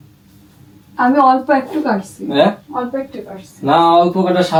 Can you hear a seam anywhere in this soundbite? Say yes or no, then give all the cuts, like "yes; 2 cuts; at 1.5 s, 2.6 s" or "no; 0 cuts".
no; 0 cuts